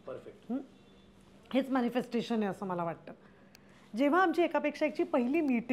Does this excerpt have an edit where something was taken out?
no; 0 cuts

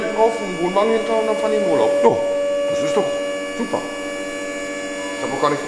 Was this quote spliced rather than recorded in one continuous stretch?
no; 0 cuts

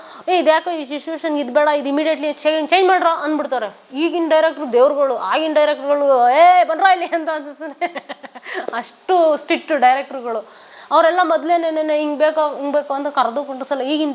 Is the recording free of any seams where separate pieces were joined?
yes; 0 cuts

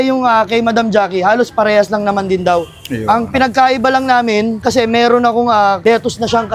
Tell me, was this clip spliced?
no; 0 cuts

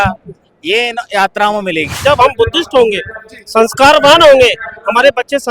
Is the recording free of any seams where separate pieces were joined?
no; 1 cut; at 2.0 s

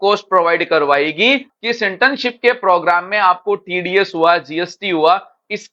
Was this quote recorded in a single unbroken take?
no; 1 cut; at 1.5 s

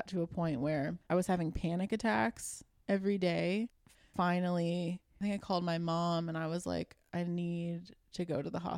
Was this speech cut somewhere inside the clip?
yes; 3 cuts; at 1.0 s, 4.1 s, 5.1 s

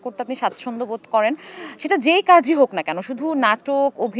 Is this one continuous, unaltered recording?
yes; 0 cuts

